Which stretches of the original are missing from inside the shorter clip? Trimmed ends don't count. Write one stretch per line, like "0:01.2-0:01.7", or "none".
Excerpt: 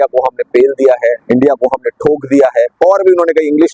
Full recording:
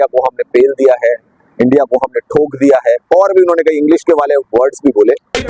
0:01.2-0:01.5

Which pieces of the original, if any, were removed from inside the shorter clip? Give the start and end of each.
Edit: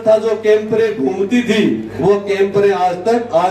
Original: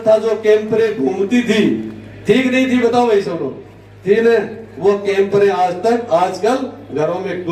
0:01.9-0:04.7

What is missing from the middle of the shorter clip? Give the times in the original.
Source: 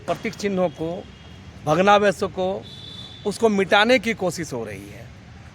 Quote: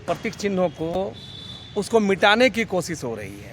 0:01.0-0:02.5

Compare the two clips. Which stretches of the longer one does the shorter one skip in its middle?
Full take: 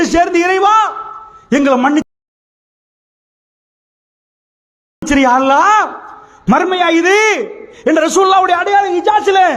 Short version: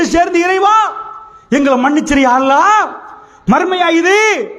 0:02.0-0:05.0

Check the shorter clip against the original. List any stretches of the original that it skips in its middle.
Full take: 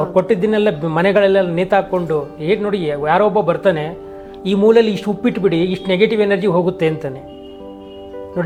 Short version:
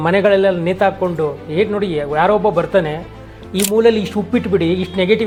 none

